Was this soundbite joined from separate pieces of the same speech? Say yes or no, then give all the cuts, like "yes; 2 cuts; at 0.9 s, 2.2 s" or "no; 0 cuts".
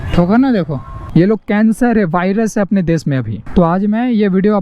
yes; 2 cuts; at 1.0 s, 3.4 s